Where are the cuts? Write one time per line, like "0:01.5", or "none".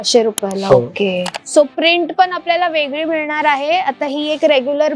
0:01.3